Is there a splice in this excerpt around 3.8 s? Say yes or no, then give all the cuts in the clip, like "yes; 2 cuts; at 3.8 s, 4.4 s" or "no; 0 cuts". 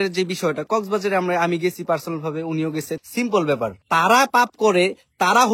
yes; 2 cuts; at 2.9 s, 3.8 s